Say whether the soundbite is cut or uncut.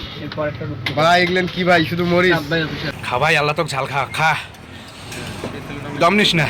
cut